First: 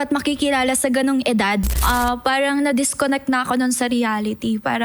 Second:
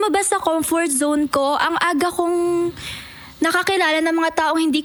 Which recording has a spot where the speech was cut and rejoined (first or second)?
first